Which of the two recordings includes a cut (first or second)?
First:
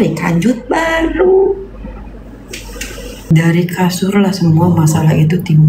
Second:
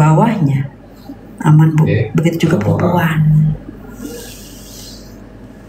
first